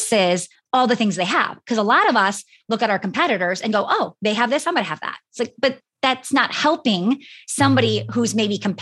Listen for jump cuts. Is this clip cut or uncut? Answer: uncut